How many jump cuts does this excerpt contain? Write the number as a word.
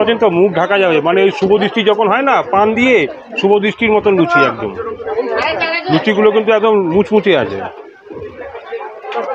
zero